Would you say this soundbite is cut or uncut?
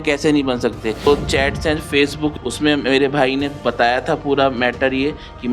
cut